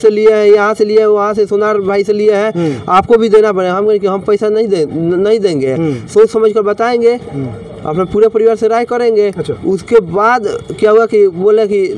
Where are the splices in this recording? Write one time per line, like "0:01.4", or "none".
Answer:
none